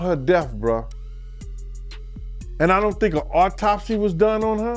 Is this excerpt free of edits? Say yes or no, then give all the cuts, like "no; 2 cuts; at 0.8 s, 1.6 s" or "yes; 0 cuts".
no; 2 cuts; at 1.3 s, 2.5 s